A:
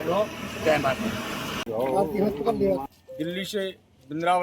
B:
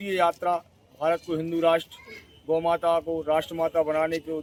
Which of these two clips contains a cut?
A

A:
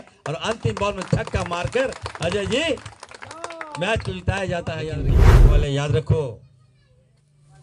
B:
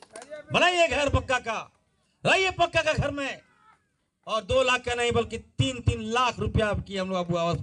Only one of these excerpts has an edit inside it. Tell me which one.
A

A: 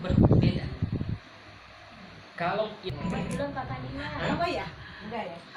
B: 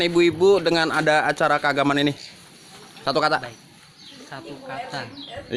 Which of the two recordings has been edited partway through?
A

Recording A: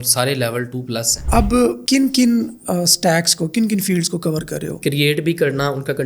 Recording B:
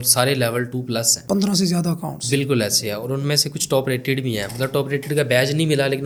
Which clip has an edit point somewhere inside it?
A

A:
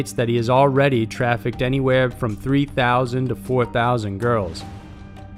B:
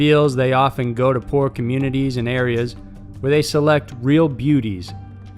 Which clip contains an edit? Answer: B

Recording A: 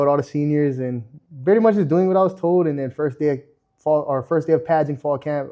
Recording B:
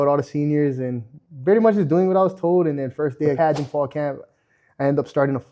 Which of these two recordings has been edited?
B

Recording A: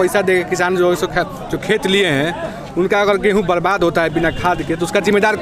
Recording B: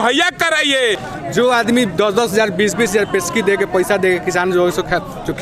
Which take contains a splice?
B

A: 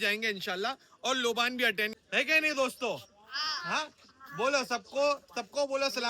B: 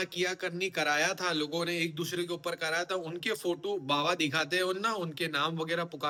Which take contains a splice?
A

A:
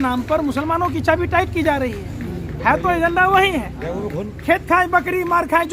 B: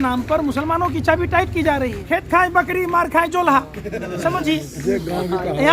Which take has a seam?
B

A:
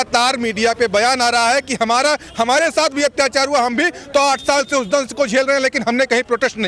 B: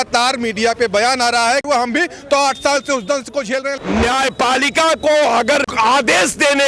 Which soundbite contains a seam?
B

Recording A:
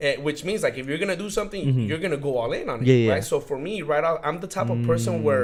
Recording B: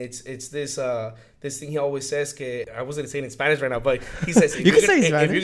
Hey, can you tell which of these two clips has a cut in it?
B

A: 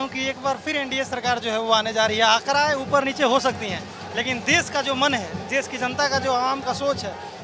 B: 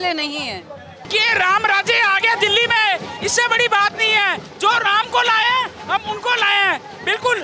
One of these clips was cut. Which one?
B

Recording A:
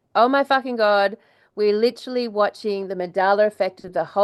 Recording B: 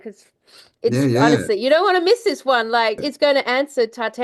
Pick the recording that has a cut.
B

